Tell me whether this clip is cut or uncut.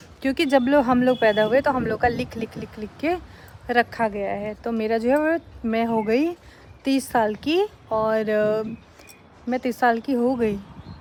uncut